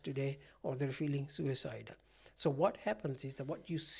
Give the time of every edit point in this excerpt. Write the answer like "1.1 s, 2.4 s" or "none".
none

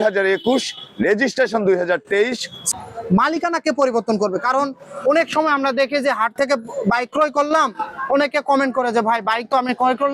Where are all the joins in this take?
2.7 s

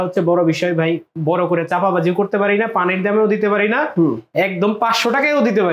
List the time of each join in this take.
none

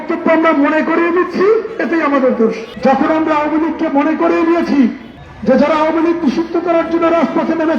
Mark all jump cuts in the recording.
2.7 s

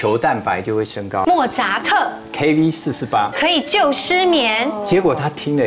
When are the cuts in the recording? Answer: 1.2 s

